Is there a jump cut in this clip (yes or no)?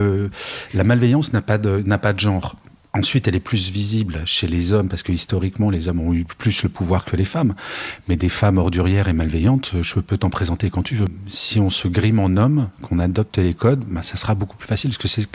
yes